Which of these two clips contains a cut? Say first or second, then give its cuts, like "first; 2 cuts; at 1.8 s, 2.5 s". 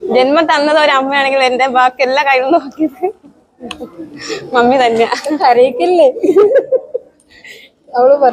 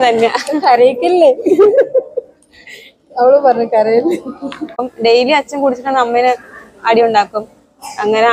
second; 1 cut; at 4.8 s